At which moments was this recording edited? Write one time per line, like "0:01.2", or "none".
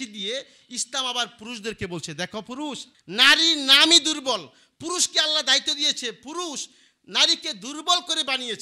0:02.9